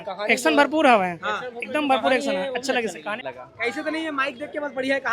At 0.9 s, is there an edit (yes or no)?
no